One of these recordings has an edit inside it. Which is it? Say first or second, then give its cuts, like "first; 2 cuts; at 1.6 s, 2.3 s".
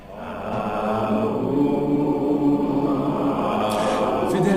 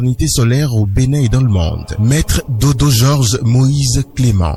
first; 1 cut; at 3.6 s